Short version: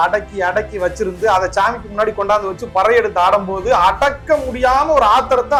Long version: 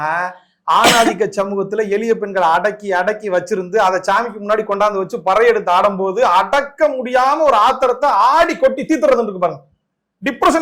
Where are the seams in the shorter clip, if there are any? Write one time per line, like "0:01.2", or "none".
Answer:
none